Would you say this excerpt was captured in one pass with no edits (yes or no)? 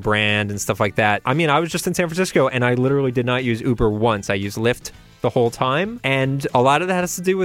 no